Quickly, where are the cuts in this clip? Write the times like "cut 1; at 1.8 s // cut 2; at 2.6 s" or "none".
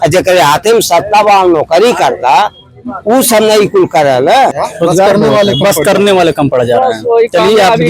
cut 1; at 4.6 s